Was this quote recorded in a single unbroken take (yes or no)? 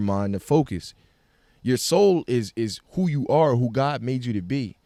yes